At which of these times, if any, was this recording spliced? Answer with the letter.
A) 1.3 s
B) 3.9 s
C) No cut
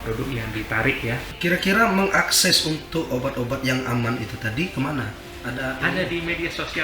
A